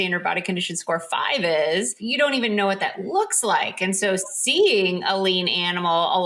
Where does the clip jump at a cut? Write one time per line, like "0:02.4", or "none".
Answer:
0:02.0